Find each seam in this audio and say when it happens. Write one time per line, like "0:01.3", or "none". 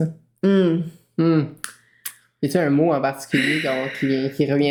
none